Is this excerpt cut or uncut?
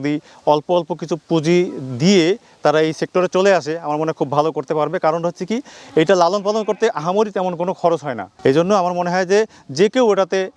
cut